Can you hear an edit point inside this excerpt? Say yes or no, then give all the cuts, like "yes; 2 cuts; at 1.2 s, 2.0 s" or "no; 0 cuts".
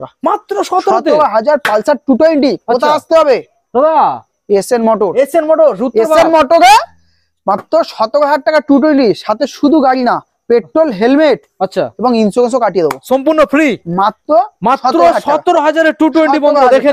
no; 0 cuts